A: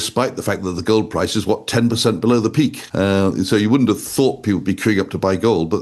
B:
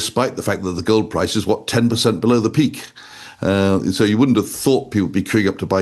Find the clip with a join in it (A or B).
A